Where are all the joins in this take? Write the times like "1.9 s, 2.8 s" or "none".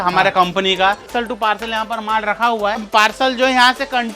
1.1 s, 2.9 s